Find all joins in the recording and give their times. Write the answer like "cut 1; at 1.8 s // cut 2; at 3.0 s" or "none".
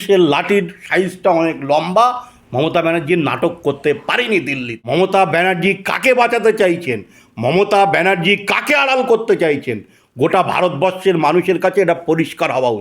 cut 1; at 5.0 s